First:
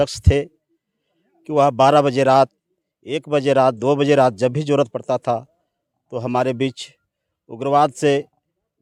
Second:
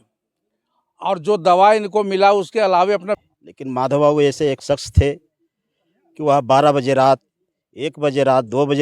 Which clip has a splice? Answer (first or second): second